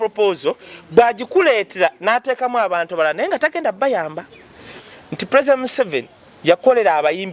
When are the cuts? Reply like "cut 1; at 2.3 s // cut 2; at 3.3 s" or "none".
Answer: cut 1; at 4.7 s